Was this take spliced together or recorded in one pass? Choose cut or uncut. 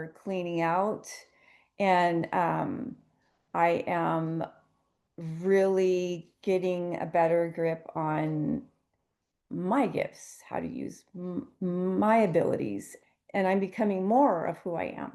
cut